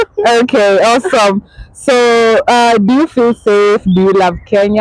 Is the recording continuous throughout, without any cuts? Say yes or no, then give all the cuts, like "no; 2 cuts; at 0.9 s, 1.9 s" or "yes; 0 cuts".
yes; 0 cuts